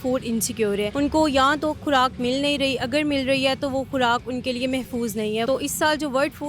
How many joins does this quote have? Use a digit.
2